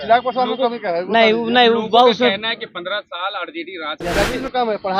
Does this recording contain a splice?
yes; 1 cut; at 3.9 s

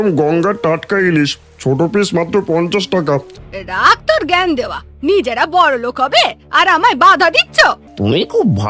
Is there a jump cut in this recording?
yes; 2 cuts; at 3.4 s, 7.9 s

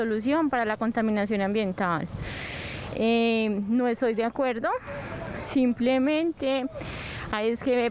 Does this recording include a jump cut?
no; 0 cuts

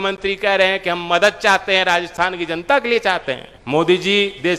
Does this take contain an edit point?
yes; 1 cut; at 3.5 s

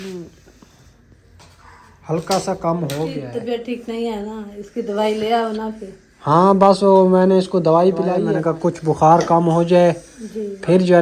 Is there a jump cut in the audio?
yes; 2 cuts; at 3.2 s, 8.2 s

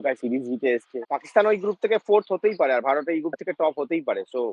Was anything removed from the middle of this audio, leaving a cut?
yes; 1 cut; at 1.0 s

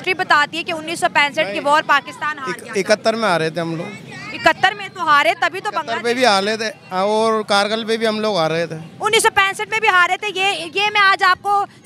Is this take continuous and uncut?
yes; 0 cuts

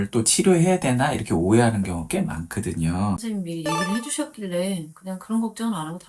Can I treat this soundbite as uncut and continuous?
no; 1 cut; at 3.2 s

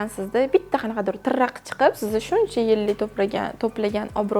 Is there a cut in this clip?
yes; 1 cut; at 2.0 s

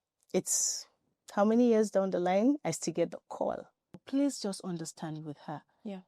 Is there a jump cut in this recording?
yes; 1 cut; at 4.0 s

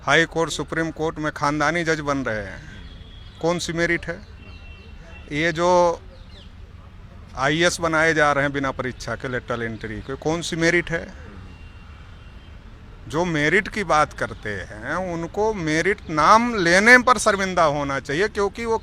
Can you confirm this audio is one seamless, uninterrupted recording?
yes; 0 cuts

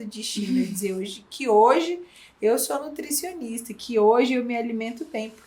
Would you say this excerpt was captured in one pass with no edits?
yes; 0 cuts

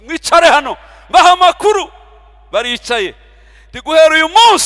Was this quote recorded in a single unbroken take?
yes; 0 cuts

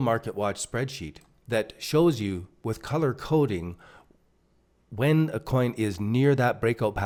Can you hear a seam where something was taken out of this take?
no; 0 cuts

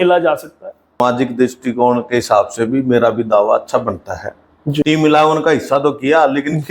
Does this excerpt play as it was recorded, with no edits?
no; 2 cuts; at 1.0 s, 4.8 s

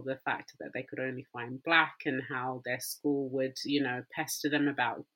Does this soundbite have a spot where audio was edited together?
no; 0 cuts

